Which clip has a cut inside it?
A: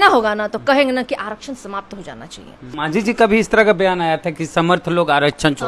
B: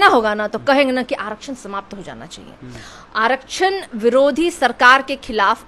A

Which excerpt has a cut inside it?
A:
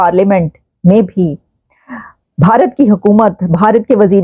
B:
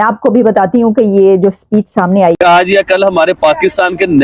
B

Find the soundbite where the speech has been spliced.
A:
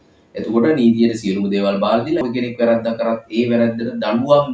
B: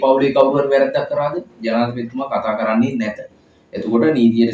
A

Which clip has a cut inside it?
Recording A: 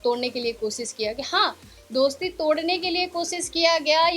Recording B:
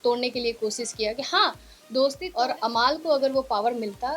B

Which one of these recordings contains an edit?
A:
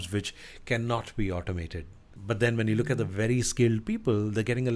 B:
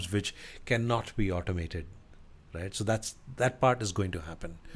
A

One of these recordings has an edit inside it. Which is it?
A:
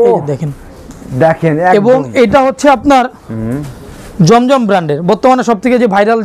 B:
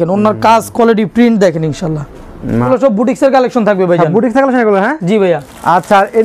B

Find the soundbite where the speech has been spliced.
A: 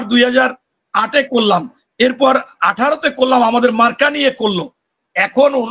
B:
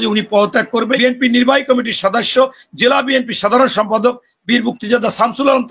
B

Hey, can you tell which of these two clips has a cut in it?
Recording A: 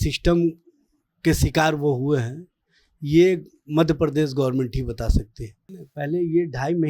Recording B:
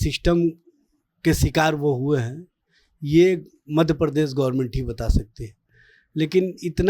A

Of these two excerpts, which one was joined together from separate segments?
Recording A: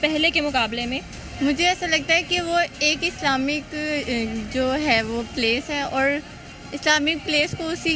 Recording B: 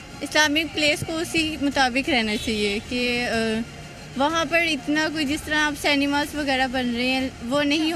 A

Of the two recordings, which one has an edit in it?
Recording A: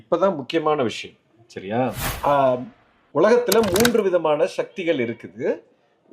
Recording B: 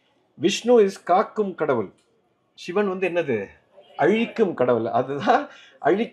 A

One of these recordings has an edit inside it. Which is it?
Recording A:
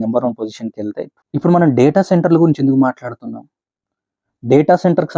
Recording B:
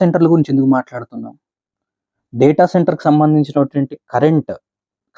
A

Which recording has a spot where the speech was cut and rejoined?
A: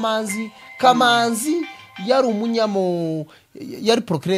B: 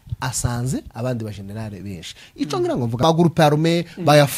B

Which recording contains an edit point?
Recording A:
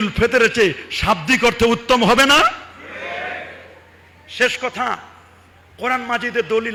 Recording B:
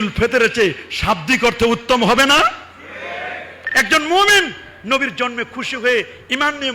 B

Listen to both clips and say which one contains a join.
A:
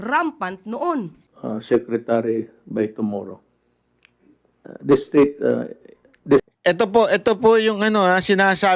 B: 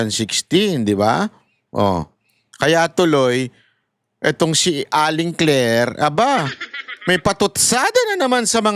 A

